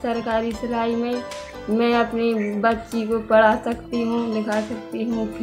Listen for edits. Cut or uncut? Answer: cut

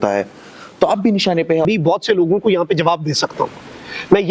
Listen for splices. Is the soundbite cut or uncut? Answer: cut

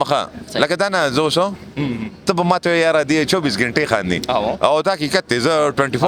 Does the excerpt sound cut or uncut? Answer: uncut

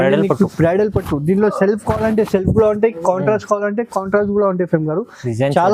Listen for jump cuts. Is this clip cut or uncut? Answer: uncut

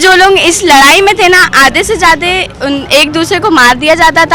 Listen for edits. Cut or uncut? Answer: uncut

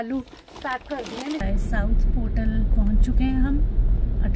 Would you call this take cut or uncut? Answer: cut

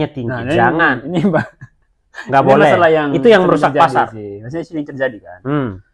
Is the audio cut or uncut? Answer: uncut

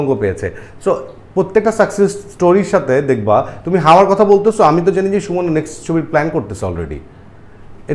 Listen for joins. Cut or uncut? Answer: uncut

